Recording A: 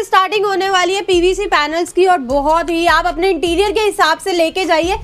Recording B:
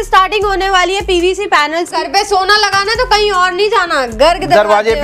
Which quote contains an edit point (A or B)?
B